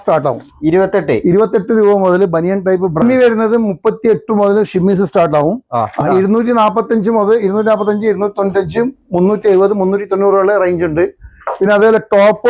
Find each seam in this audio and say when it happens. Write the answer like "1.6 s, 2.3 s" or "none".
3.0 s, 6.0 s